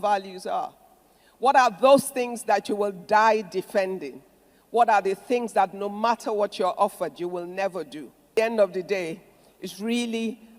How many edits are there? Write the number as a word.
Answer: one